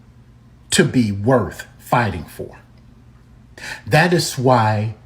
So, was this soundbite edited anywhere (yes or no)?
yes